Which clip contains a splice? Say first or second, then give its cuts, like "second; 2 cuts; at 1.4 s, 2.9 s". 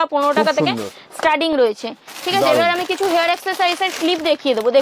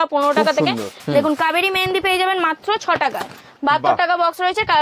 second; 1 cut; at 0.9 s